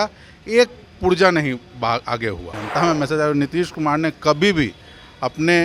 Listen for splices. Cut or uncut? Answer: cut